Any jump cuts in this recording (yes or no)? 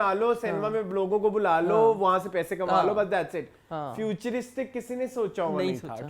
no